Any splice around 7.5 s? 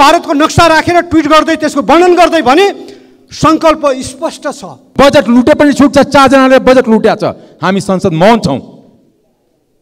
no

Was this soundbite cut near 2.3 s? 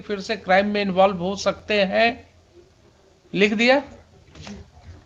no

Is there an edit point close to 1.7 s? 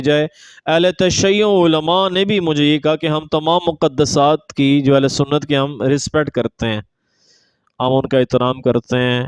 no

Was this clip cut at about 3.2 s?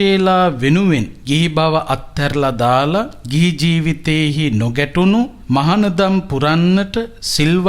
yes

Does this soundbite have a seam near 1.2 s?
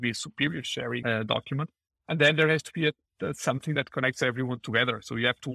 no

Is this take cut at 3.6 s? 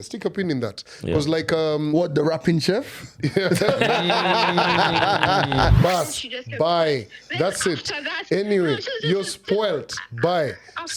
no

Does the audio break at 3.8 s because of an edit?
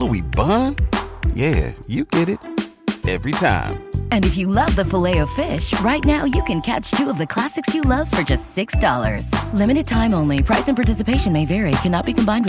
no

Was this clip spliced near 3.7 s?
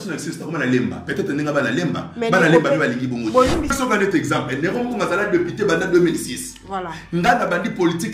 yes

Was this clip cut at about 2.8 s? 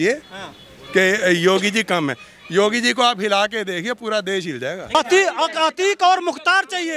no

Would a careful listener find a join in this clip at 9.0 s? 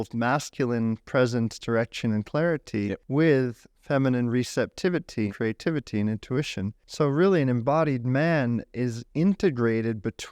no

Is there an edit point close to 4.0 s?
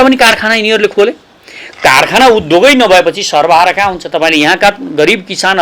no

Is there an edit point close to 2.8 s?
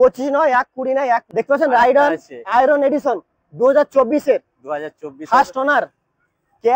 no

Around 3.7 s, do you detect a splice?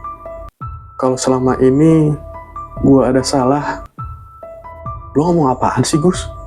yes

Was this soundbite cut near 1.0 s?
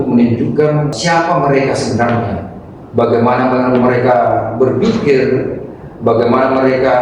yes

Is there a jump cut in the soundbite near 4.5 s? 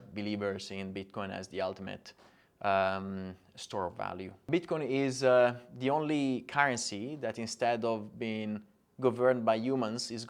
yes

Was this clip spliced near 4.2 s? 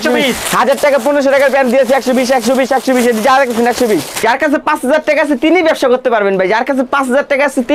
yes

